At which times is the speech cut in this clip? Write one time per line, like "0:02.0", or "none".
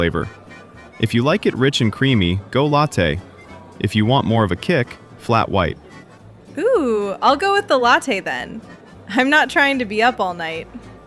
0:06.7